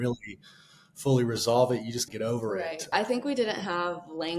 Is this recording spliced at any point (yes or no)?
yes